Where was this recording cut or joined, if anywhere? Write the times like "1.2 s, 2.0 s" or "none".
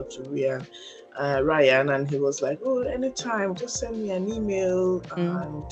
none